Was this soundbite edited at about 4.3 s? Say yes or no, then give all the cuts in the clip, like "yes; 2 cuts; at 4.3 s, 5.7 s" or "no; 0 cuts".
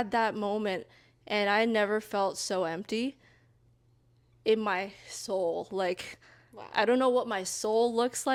no; 0 cuts